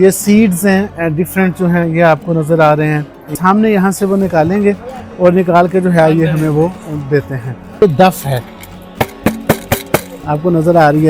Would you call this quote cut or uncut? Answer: cut